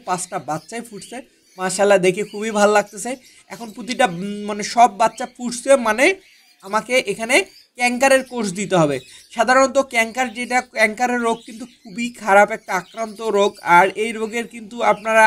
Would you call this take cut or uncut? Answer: uncut